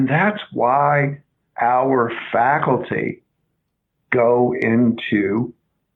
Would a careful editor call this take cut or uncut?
uncut